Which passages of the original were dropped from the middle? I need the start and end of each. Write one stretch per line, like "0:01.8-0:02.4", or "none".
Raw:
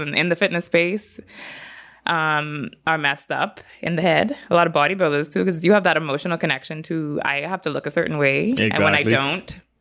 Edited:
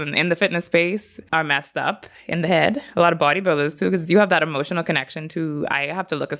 0:01.2-0:02.7